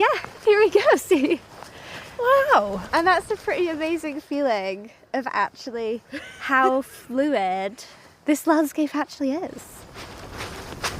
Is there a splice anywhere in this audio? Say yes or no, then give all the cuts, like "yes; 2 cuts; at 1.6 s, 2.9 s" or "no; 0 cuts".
yes; 1 cut; at 9.8 s